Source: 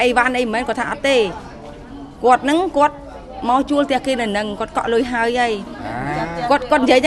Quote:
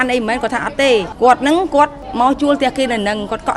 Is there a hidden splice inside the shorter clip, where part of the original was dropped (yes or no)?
yes